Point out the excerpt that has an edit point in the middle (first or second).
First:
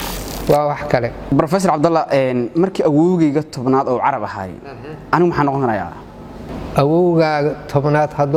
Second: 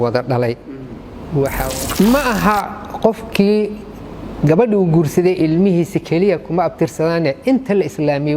second